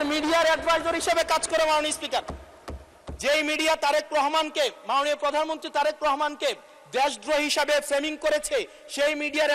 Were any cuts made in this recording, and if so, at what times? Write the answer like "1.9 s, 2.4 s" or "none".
none